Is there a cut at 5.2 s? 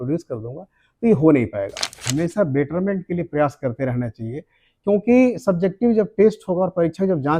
no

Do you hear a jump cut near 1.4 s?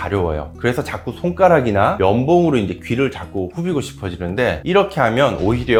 no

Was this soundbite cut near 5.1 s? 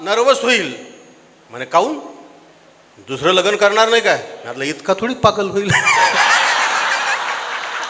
no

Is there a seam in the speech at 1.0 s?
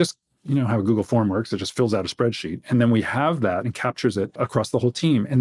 no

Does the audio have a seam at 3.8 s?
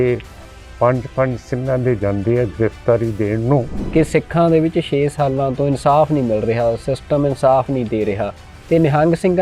yes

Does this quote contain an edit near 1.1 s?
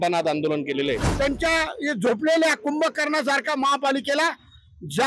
yes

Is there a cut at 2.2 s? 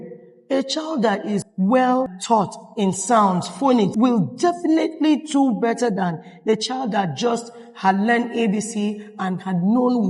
yes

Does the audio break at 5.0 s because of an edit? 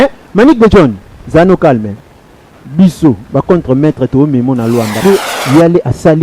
yes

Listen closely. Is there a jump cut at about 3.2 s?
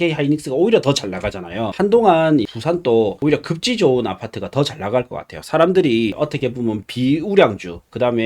yes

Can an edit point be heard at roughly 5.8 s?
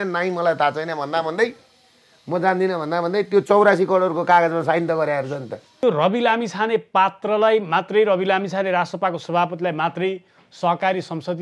yes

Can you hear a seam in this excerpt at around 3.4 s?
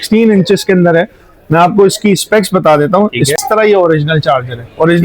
yes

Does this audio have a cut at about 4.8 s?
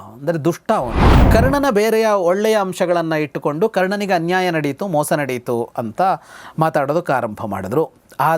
no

